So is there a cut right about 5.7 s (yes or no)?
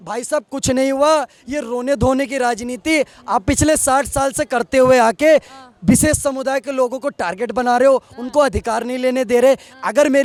no